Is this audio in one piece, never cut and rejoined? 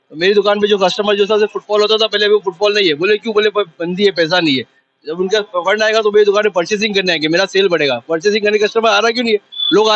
yes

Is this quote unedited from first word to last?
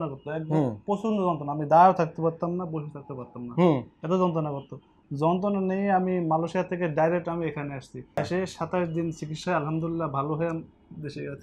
no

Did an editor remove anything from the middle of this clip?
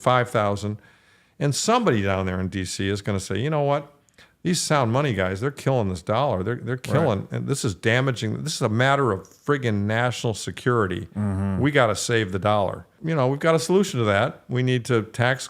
yes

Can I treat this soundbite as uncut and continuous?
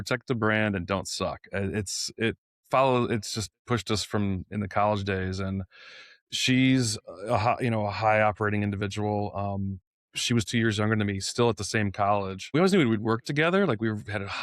no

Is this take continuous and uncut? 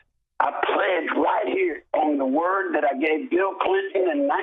yes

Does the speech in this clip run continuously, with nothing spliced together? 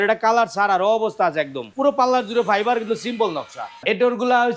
no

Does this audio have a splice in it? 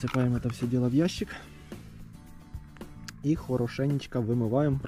no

